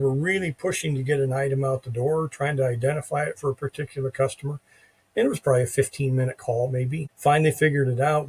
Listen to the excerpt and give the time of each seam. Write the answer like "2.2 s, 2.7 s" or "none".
none